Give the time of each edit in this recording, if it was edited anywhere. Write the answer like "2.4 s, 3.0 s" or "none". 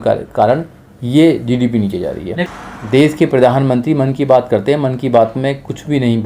2.5 s